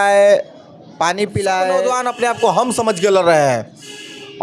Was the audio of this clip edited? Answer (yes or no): yes